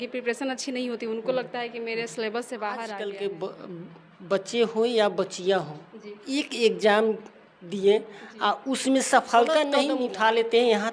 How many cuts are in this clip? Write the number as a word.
two